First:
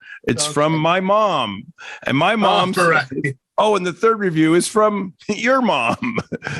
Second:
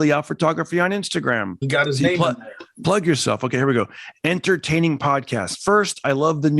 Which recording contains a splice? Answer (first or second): second